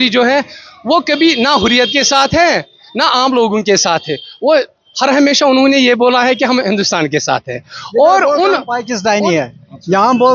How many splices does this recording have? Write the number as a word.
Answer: zero